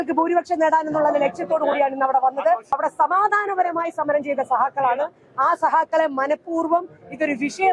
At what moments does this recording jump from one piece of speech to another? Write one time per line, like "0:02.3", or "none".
0:02.7

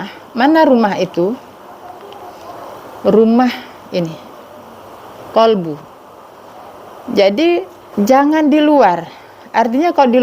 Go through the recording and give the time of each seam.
0:07.8

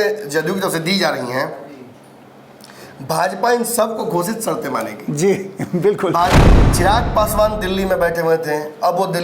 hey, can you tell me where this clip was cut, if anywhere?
0:06.4

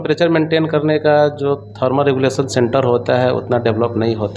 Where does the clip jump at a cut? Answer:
none

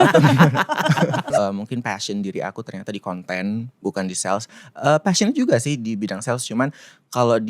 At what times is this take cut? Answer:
0:01.3

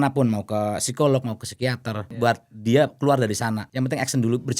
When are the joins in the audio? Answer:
0:02.1
0:03.7

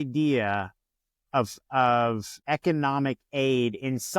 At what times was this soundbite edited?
0:02.3

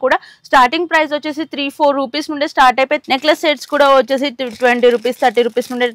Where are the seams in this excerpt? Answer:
0:03.0

